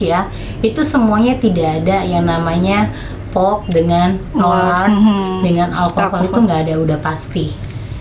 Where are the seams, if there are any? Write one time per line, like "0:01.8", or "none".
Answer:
none